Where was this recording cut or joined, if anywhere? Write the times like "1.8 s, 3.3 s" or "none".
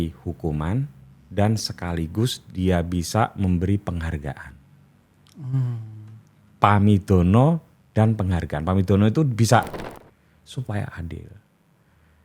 9.8 s